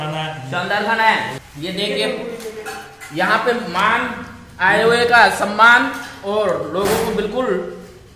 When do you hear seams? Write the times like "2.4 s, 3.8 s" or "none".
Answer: 1.4 s

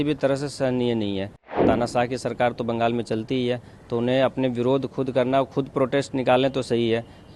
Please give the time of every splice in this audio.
1.6 s

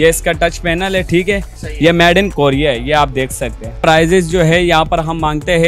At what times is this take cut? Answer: 1.5 s, 3.8 s

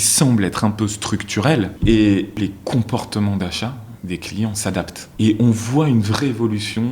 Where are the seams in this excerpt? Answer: 1.7 s, 2.4 s, 5.0 s

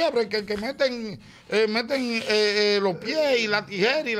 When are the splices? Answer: none

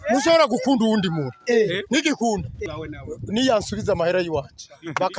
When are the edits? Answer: 2.6 s

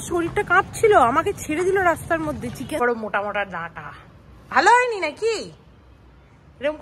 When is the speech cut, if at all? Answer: 2.8 s

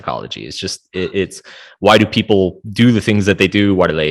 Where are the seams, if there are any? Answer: none

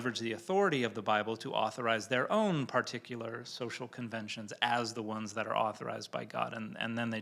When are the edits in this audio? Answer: none

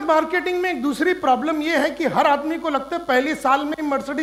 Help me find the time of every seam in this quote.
none

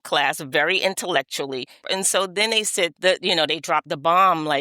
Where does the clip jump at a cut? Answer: 1.8 s, 2.9 s

